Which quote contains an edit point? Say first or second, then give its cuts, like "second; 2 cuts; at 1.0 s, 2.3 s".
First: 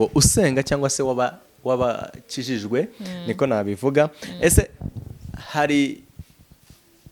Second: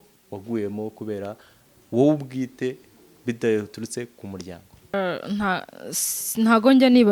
second; 1 cut; at 4.9 s